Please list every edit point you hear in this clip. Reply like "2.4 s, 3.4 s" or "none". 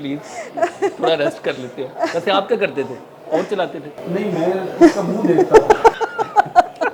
none